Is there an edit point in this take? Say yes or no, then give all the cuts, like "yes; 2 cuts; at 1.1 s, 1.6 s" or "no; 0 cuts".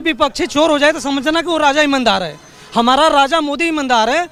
no; 0 cuts